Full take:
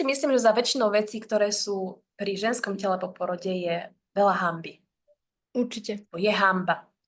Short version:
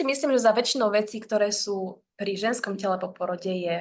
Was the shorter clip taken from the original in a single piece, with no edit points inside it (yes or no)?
yes